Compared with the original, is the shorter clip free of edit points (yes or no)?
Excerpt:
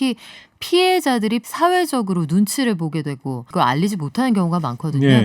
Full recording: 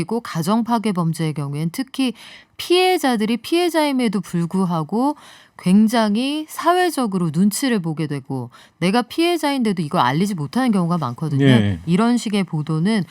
no